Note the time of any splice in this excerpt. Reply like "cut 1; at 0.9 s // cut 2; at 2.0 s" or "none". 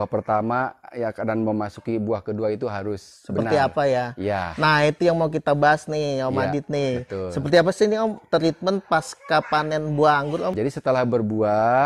cut 1; at 10.5 s